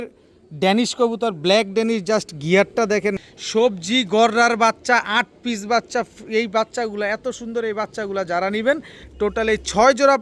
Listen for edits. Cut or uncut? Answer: cut